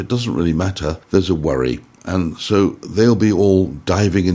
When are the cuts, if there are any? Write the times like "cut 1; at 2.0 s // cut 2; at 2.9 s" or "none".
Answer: cut 1; at 1.0 s